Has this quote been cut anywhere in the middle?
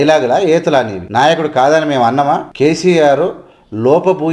yes; 2 cuts; at 1.0 s, 2.5 s

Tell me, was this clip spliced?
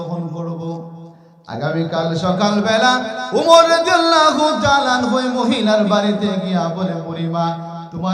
no; 0 cuts

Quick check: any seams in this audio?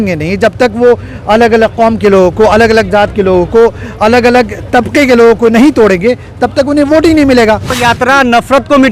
yes; 1 cut; at 7.8 s

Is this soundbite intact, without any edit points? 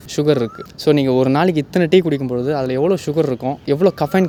yes; 0 cuts

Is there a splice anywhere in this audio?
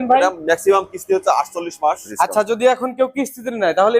yes; 1 cut; at 2.1 s

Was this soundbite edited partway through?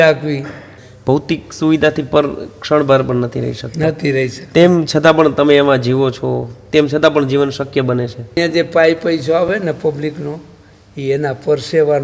yes; 2 cuts; at 1.2 s, 8.4 s

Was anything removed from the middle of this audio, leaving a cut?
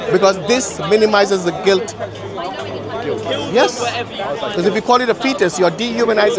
no; 0 cuts

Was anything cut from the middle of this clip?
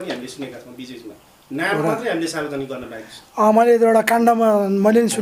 no; 0 cuts

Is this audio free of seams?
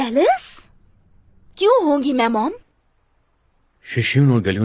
no; 1 cut; at 2.6 s

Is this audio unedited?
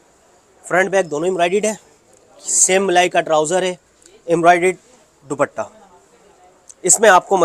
yes; 0 cuts

